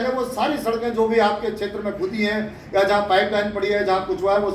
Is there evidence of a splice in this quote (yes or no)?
no